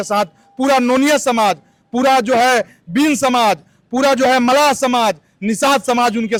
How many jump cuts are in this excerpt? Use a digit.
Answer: 0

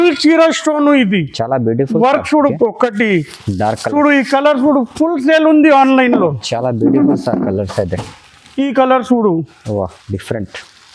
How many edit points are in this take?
1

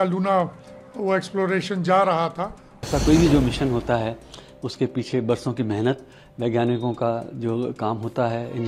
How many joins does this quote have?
1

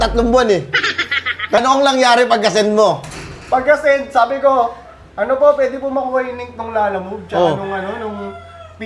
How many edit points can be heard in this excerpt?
1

